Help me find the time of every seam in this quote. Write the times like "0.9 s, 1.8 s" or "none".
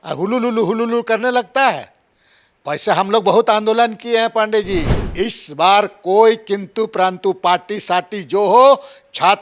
5.0 s